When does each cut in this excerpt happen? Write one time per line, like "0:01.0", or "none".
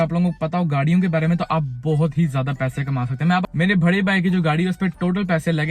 0:03.4